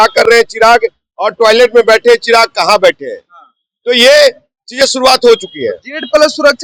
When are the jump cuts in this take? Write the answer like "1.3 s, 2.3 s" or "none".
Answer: none